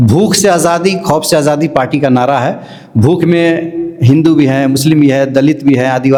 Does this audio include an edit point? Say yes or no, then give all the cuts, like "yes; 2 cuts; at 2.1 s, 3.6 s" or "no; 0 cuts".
no; 0 cuts